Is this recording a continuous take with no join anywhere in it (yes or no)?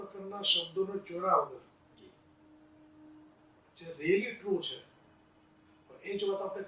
yes